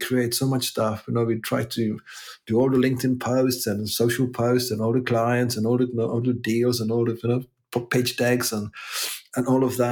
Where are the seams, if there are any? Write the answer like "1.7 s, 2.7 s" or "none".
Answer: none